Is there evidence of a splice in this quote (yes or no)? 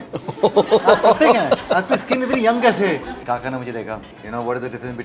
yes